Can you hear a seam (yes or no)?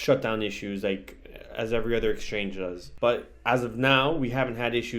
yes